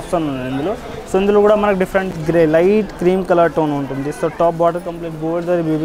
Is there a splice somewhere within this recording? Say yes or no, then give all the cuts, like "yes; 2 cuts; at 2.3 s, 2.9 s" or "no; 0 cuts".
yes; 1 cut; at 2.2 s